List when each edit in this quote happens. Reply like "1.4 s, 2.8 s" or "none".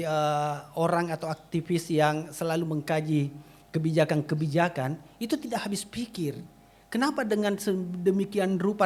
none